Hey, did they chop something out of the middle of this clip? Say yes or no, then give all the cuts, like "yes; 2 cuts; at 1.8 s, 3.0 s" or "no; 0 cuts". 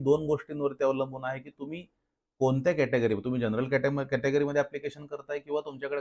no; 0 cuts